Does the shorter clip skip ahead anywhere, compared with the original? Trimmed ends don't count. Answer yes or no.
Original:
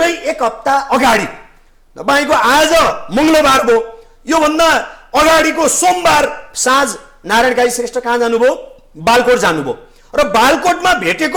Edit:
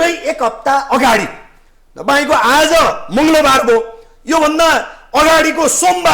no